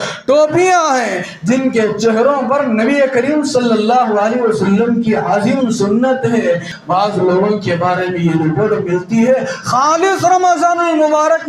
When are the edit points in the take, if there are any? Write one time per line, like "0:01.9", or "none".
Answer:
0:06.8